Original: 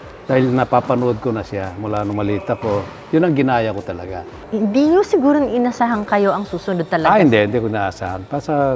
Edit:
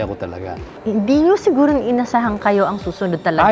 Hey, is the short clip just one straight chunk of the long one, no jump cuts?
yes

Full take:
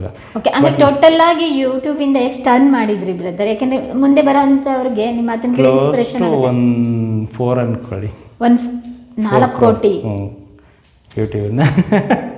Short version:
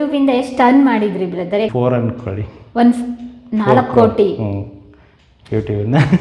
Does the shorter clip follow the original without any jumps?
no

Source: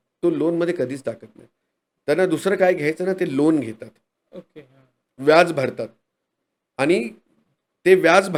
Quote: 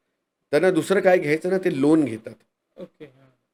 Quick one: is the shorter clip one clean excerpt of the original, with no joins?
yes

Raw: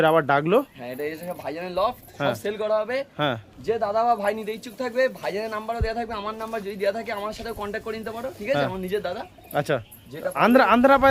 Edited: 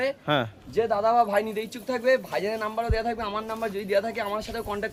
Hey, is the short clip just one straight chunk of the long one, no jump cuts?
yes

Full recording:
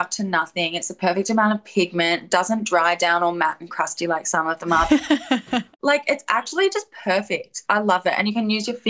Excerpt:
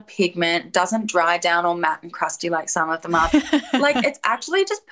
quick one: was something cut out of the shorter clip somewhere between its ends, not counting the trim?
yes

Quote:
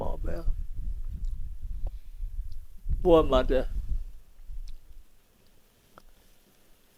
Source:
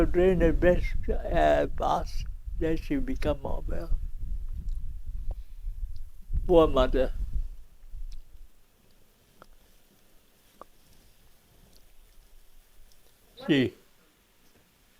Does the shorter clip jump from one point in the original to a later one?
no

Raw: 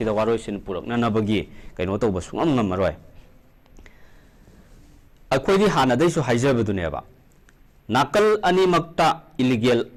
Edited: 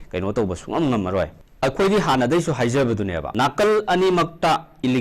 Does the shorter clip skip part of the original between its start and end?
yes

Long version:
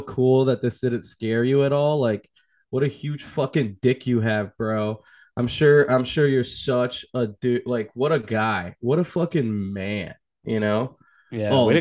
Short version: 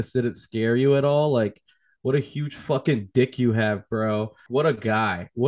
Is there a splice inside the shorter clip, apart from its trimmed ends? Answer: yes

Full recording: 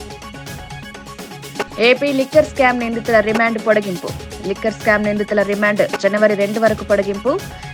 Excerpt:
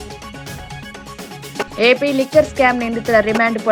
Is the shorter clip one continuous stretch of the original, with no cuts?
yes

